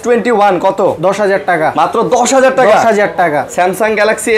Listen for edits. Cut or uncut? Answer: uncut